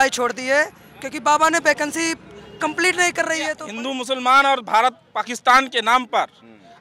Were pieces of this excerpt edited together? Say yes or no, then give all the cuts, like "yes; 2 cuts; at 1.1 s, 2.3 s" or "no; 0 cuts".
yes; 1 cut; at 3.6 s